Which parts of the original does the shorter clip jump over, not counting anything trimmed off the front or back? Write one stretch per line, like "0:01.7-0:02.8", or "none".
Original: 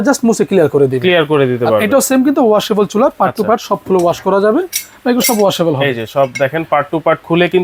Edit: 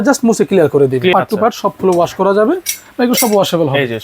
0:01.1-0:03.2